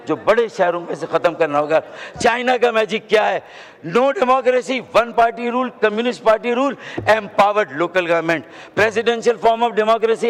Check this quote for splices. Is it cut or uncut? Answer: uncut